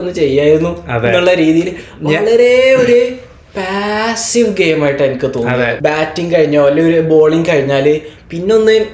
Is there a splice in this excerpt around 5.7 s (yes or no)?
yes